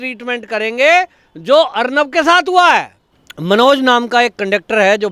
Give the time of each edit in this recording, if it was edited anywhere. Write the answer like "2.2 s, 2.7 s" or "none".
3.3 s